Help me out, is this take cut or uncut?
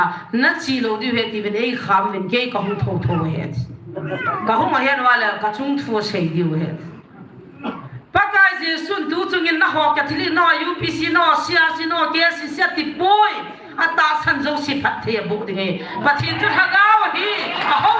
uncut